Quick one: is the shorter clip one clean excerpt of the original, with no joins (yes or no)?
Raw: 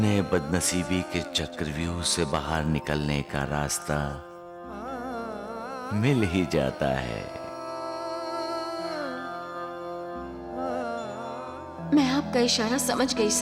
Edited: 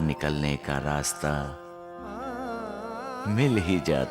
yes